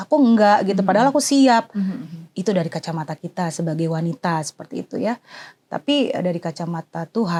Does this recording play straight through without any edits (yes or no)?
yes